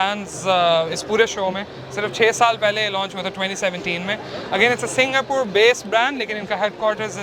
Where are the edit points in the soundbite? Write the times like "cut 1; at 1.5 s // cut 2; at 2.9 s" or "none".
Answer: none